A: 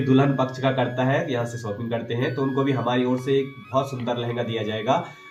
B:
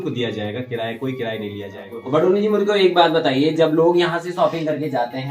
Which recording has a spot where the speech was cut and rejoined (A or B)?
B